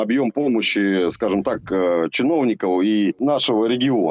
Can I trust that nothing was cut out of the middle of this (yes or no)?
no